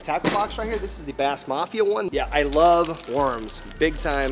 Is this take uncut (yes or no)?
no